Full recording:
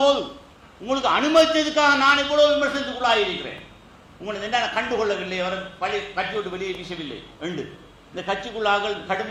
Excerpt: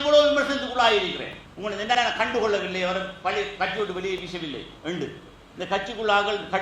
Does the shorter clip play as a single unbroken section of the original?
no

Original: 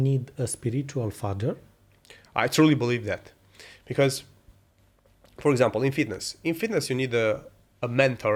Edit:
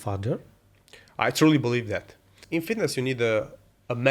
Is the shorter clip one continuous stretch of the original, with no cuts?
no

